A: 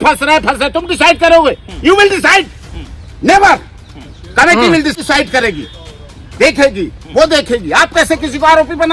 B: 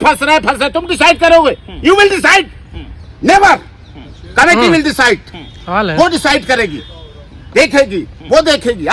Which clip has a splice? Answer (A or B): A